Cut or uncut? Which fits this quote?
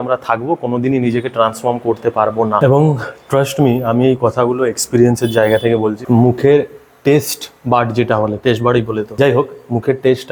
uncut